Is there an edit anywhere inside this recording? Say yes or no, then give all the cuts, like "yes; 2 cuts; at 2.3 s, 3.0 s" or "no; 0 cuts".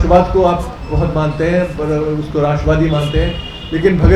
no; 0 cuts